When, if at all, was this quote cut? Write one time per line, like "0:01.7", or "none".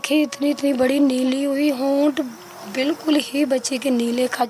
none